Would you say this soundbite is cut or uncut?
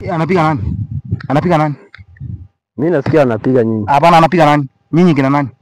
uncut